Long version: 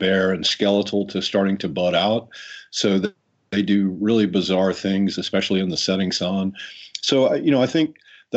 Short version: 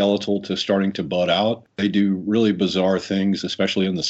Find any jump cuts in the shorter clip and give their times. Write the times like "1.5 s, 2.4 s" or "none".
1.7 s